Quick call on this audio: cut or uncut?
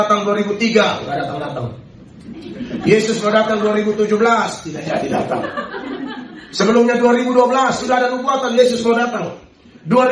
uncut